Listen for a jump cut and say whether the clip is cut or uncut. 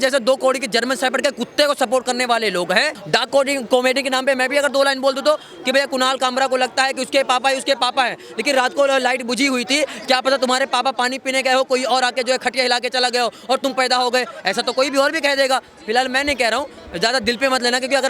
cut